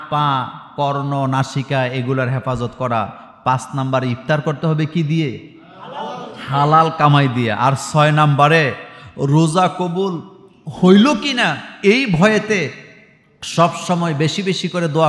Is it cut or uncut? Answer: uncut